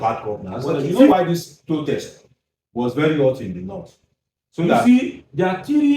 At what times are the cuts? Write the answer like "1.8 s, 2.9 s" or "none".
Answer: 1.1 s, 4.8 s